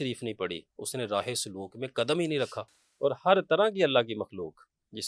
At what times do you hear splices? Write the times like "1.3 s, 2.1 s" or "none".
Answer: 2.7 s